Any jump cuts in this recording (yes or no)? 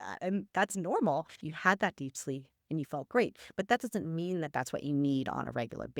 yes